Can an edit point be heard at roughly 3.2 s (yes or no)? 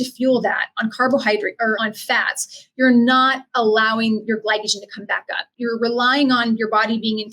no